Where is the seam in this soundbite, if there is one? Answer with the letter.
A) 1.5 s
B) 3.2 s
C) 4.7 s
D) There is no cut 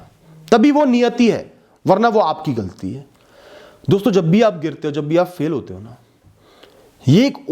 B